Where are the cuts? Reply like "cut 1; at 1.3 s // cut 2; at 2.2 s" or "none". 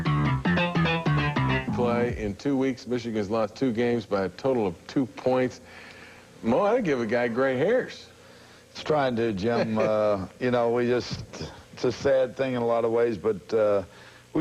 cut 1; at 6.4 s